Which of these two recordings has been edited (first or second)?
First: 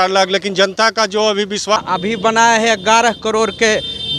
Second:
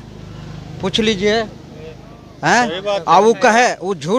first